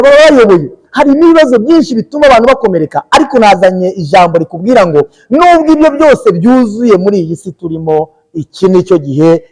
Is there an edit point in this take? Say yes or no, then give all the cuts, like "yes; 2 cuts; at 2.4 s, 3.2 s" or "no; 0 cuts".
no; 0 cuts